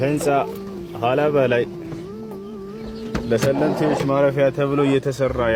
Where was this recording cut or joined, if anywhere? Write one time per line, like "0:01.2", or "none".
none